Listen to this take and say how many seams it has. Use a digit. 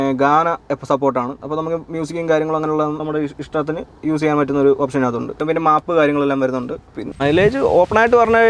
1